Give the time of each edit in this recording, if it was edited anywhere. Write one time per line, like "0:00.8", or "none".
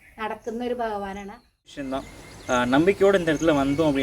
0:01.7